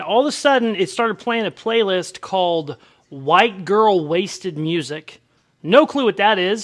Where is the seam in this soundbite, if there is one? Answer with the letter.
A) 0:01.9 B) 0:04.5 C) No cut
C